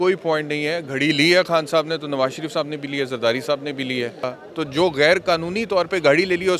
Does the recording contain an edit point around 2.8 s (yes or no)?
no